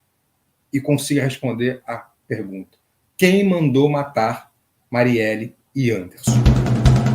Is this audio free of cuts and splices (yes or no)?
no